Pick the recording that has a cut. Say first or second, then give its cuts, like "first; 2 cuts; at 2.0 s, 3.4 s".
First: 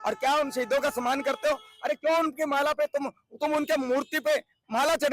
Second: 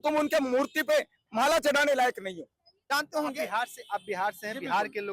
second; 1 cut; at 2.9 s